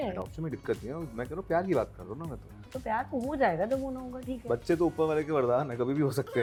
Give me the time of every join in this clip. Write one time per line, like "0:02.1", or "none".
none